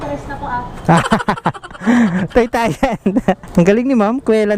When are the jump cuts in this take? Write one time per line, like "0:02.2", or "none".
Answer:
0:03.4